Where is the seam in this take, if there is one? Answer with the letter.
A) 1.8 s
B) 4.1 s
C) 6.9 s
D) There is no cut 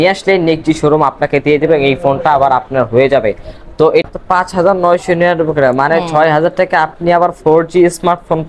B